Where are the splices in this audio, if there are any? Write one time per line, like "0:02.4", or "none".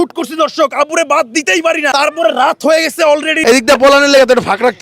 0:01.9
0:03.4